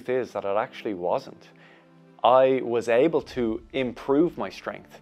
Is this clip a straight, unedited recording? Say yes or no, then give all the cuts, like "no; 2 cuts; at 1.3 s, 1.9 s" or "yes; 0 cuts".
yes; 0 cuts